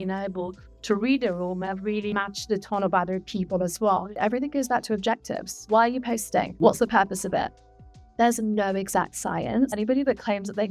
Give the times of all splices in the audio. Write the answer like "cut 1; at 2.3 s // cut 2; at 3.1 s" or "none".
cut 1; at 2.1 s // cut 2; at 4.2 s // cut 3; at 5.7 s // cut 4; at 6.5 s // cut 5; at 9.7 s